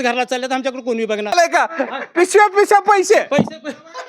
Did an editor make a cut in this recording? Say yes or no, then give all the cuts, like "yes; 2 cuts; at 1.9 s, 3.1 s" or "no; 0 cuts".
no; 0 cuts